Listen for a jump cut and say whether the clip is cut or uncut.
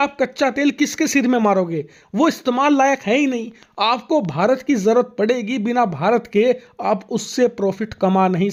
uncut